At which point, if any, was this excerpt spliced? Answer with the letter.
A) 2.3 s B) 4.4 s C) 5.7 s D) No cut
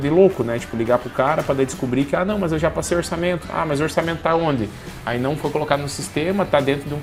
D